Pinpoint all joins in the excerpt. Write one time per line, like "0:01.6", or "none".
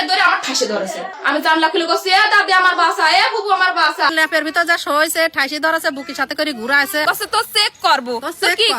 0:01.1
0:04.1
0:07.0